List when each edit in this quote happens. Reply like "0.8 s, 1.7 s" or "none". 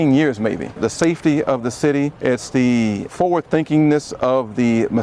none